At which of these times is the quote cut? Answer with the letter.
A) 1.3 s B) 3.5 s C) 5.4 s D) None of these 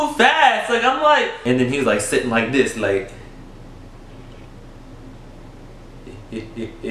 A